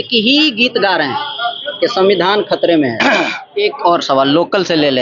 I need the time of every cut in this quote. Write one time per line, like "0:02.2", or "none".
0:03.4